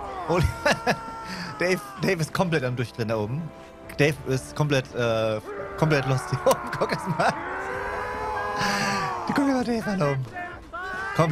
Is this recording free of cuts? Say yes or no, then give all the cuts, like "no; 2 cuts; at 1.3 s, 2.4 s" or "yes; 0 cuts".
yes; 0 cuts